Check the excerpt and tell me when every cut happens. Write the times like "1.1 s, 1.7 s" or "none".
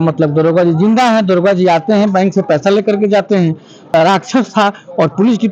3.8 s